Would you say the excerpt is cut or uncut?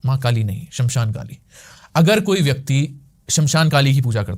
uncut